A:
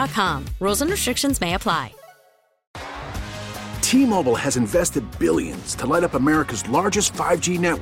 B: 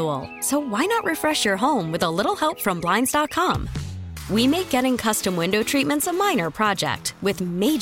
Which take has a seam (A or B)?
A